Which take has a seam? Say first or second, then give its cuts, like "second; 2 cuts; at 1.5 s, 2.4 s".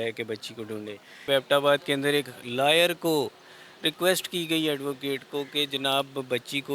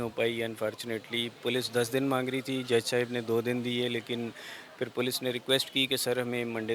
first; 1 cut; at 1.3 s